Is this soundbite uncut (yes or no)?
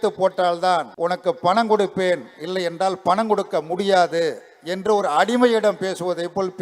no